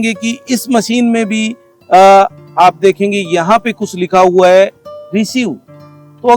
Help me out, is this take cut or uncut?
uncut